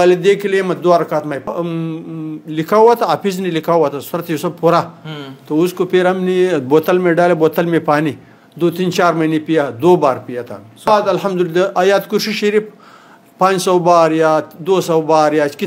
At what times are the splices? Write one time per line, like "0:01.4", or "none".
0:01.5
0:10.9